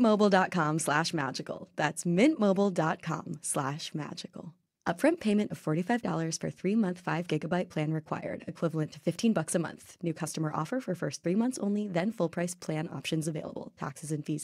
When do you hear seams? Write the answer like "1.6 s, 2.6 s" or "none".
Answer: none